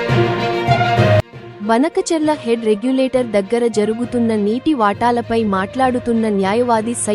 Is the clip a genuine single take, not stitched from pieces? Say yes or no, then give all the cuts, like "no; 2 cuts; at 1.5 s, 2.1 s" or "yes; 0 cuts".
no; 1 cut; at 1.4 s